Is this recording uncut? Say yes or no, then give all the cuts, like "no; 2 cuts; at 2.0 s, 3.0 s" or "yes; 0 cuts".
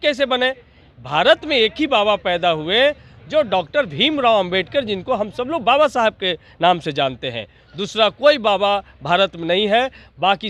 yes; 0 cuts